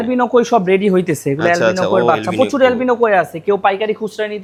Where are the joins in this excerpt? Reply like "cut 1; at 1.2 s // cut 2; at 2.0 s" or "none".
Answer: none